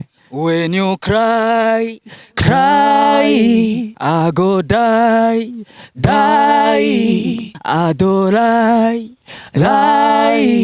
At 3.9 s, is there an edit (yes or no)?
yes